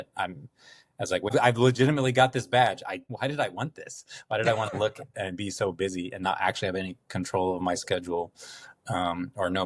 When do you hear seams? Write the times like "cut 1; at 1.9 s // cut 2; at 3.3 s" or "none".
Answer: cut 1; at 1.3 s // cut 2; at 3.1 s